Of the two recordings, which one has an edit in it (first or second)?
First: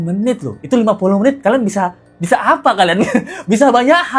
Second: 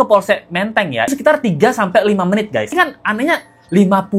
second